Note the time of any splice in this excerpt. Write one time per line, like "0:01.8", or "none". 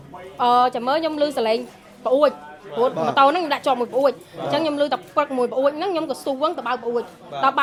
none